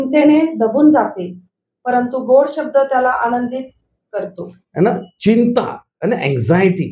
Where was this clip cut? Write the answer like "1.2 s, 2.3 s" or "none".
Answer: 5.8 s